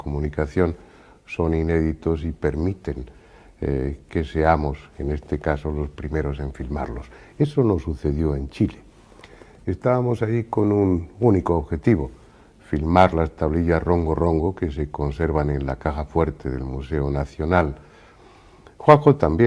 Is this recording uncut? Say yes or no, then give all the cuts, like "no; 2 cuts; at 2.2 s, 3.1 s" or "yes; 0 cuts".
no; 1 cut; at 17.4 s